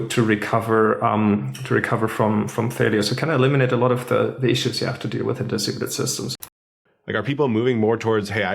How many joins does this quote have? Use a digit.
1